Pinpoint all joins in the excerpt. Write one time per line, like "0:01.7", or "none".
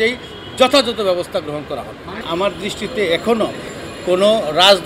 0:02.2

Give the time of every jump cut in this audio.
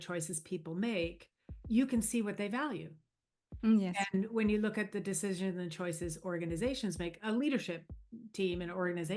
none

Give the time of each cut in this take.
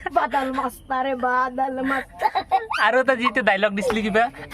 0:03.3

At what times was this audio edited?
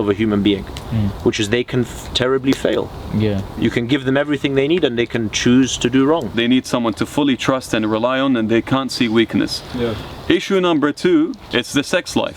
0:06.3
0:11.4

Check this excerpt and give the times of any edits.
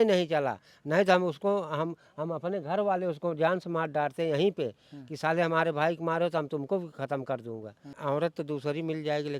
0:08.0

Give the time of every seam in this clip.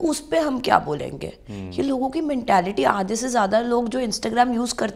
none

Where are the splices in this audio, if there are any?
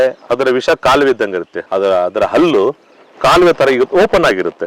0:01.6

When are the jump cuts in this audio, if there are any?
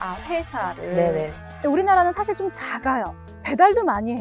0:01.5

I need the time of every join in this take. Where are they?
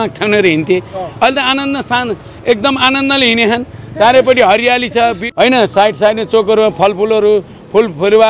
0:05.2

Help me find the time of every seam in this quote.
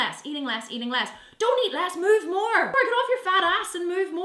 0:02.8

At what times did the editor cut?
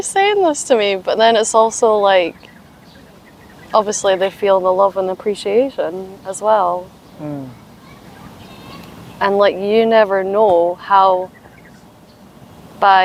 none

